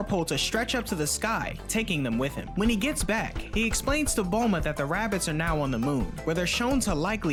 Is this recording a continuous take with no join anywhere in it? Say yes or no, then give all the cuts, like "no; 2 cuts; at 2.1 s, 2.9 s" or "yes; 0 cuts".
yes; 0 cuts